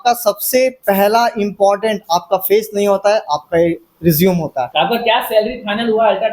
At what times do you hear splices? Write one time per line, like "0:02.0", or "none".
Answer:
0:04.7